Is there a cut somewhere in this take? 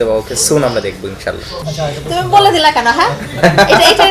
yes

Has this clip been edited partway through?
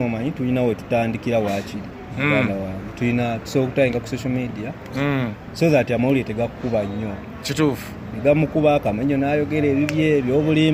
no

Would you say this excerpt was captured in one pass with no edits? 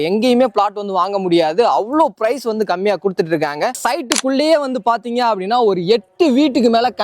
no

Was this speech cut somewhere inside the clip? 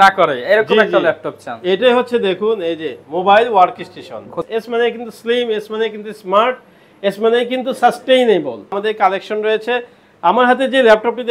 yes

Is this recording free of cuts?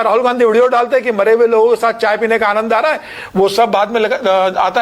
yes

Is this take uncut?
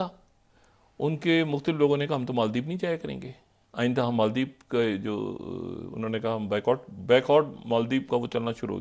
yes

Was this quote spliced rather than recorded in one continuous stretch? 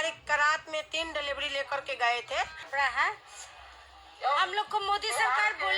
yes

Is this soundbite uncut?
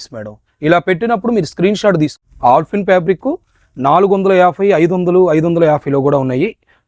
no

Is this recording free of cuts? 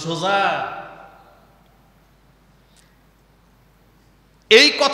yes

